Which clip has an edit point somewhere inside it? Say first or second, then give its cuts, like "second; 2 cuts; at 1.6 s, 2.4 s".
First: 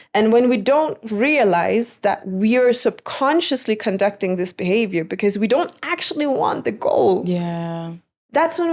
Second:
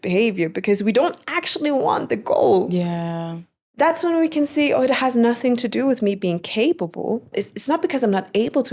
second; 1 cut; at 7.3 s